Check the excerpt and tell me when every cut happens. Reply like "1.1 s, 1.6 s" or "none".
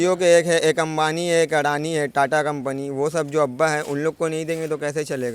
none